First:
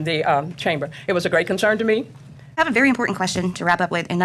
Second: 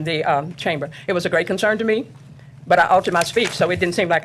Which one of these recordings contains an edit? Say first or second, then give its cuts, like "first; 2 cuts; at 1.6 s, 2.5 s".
first; 1 cut; at 2.6 s